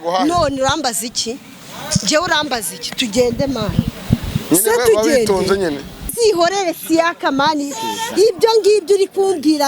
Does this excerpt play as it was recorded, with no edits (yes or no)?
no